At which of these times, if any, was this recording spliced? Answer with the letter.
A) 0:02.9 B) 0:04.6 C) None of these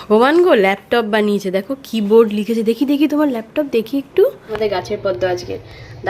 B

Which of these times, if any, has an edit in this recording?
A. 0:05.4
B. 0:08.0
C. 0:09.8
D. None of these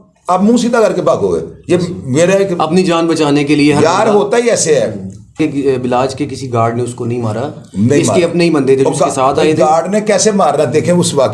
A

